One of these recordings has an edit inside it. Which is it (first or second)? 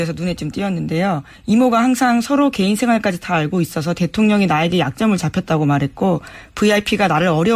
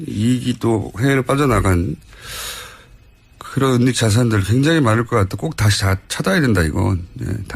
second